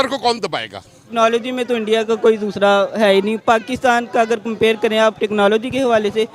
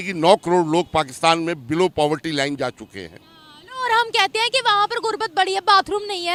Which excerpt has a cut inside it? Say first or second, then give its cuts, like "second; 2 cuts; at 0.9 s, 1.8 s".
first; 1 cut; at 1.1 s